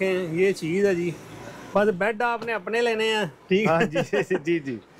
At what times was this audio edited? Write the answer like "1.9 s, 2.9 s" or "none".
none